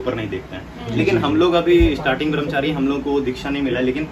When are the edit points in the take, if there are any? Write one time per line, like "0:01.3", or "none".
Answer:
none